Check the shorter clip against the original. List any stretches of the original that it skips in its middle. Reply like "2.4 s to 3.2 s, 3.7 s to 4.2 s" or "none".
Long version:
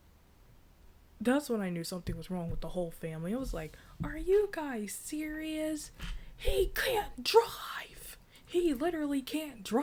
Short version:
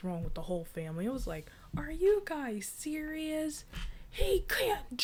none